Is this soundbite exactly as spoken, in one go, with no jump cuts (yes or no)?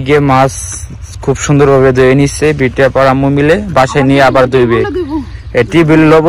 yes